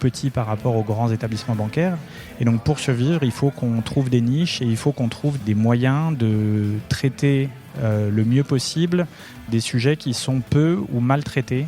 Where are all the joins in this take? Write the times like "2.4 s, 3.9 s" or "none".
5.4 s, 9.5 s